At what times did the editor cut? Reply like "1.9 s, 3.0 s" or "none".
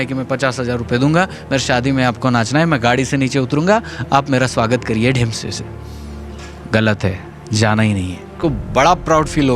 8.3 s